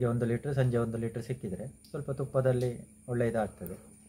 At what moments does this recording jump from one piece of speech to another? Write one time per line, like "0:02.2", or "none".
none